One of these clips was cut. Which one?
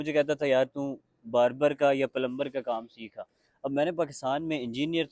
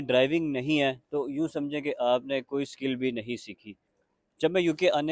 second; 1 cut; at 4.1 s

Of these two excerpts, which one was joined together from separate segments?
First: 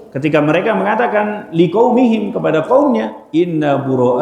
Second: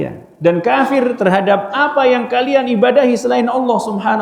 first; 1 cut; at 3.2 s

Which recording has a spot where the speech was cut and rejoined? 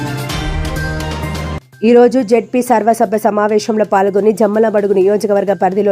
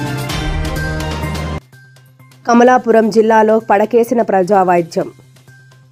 first; 1 cut; at 1.7 s

